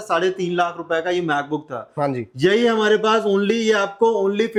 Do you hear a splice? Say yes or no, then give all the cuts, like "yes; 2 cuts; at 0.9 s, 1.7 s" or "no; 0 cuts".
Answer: no; 0 cuts